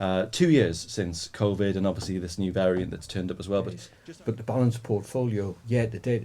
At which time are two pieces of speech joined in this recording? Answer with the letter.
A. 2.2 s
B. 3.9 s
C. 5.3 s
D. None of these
B